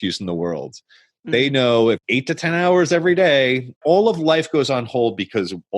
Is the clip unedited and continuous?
no; 2 cuts; at 2.0 s, 3.8 s

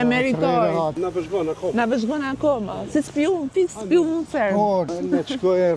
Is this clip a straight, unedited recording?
no; 2 cuts; at 0.9 s, 4.9 s

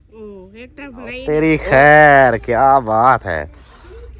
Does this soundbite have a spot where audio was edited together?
yes; 1 cut; at 1.2 s

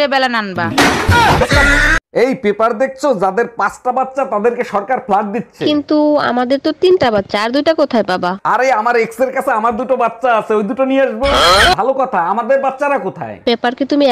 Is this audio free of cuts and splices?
yes; 0 cuts

